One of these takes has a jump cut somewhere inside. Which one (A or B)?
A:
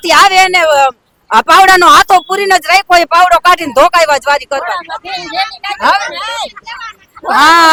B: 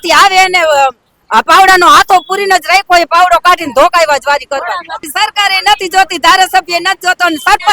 B